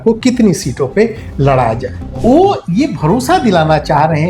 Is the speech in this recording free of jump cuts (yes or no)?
no